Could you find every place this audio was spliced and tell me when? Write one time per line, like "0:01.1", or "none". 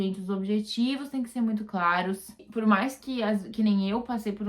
0:02.5

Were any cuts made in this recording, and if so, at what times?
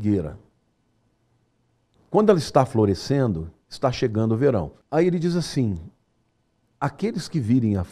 0:04.8

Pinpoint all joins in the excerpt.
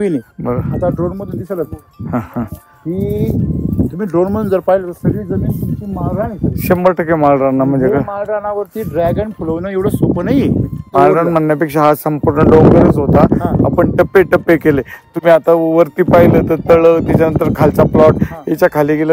0:10.9

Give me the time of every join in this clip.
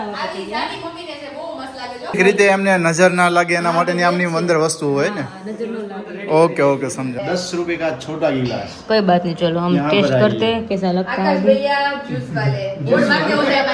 0:02.1
0:07.2

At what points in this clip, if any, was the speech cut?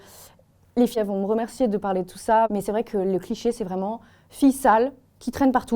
0:01.0
0:02.5

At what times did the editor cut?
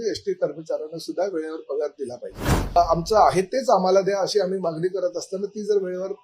0:02.8

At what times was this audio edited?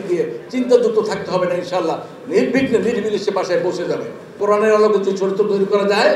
0:04.4

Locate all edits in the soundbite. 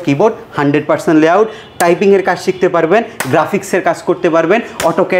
none

